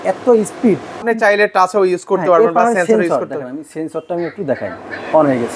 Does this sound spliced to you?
yes; 1 cut; at 1.0 s

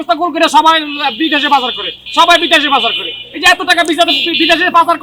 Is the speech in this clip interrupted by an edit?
no; 0 cuts

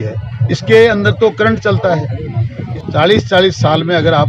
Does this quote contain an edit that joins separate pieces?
yes; 1 cut; at 2.7 s

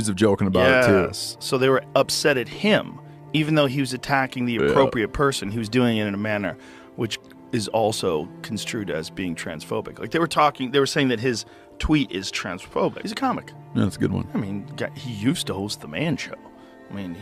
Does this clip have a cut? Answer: yes; 1 cut; at 13.1 s

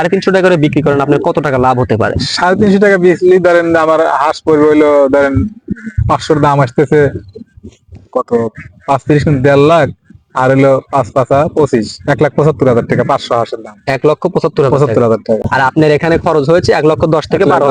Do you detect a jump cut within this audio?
no; 0 cuts

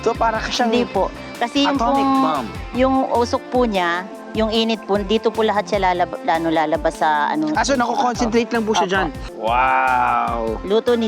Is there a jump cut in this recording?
yes; 1 cut; at 9.3 s

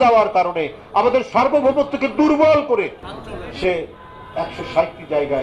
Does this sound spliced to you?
yes; 1 cut; at 3.1 s

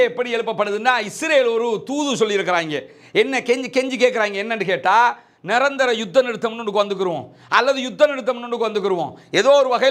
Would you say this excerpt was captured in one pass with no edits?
yes; 0 cuts

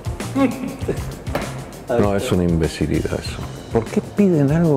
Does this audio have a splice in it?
yes; 1 cut; at 3.6 s

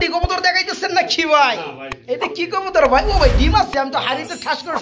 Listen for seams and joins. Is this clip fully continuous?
yes; 0 cuts

